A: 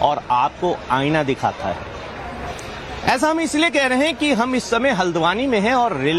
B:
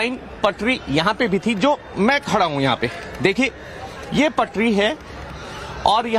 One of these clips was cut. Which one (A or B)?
A